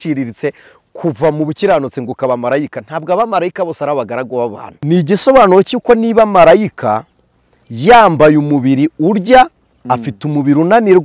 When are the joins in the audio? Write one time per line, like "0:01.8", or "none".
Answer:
0:04.7